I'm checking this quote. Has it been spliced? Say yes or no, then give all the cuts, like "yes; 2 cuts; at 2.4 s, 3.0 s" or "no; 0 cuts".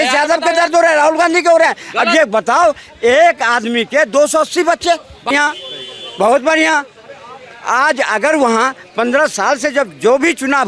yes; 1 cut; at 5.3 s